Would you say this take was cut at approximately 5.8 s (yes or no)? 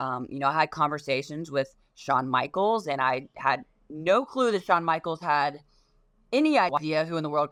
no